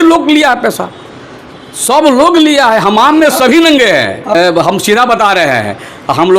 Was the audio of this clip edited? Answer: yes; 1 cut; at 4.3 s

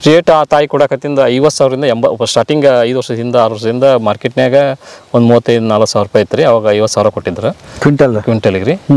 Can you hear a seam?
no; 0 cuts

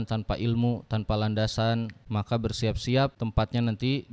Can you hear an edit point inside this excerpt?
yes; 2 cuts; at 2.0 s, 3.2 s

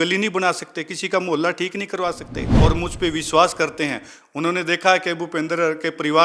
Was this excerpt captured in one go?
no; 1 cut; at 2.5 s

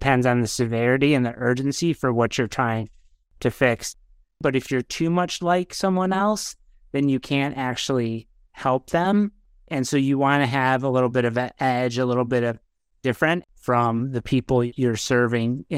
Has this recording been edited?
yes; 4 cuts; at 3.9 s, 9.7 s, 13.4 s, 14.7 s

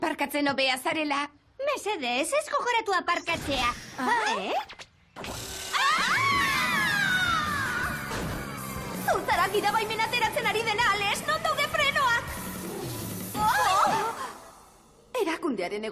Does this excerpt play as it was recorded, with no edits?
no; 1 cut; at 14.9 s

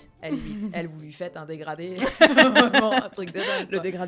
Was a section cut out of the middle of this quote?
no; 0 cuts

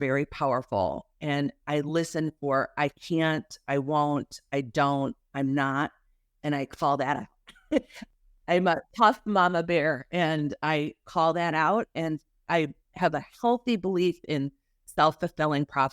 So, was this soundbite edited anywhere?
yes; 1 cut; at 8.1 s

